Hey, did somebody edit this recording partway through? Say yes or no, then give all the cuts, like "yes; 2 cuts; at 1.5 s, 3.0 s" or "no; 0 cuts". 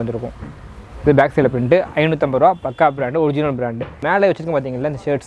yes; 1 cut; at 3.9 s